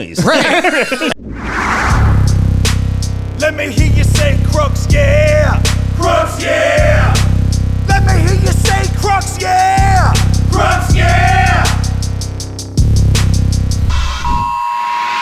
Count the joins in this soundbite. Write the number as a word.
one